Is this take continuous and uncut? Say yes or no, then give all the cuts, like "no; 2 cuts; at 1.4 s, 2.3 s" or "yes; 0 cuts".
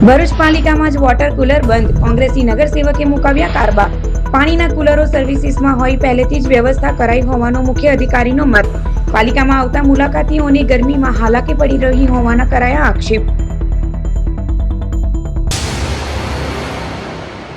no; 1 cut; at 15.5 s